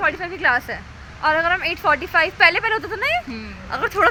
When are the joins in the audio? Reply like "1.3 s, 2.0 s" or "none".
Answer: none